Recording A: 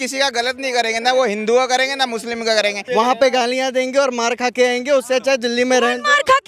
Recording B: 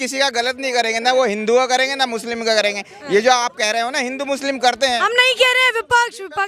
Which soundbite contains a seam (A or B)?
A